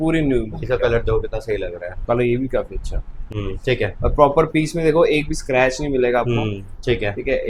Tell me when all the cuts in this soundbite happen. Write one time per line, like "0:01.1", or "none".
none